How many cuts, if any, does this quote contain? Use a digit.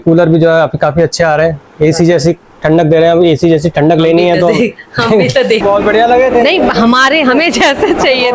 1